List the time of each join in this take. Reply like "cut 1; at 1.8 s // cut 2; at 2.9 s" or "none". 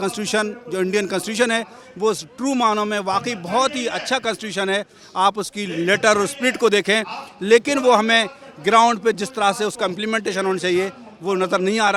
none